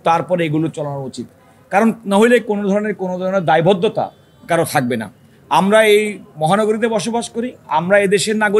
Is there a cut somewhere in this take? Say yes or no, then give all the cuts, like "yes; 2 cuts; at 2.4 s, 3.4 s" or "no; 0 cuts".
no; 0 cuts